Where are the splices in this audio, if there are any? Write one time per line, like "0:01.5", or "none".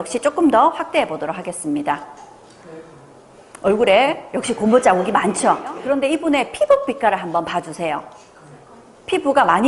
0:05.7

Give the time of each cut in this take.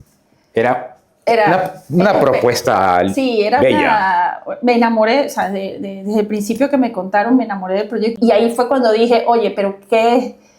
0:08.2

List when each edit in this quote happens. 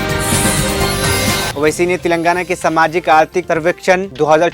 0:01.5

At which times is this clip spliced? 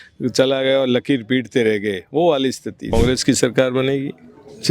0:02.9

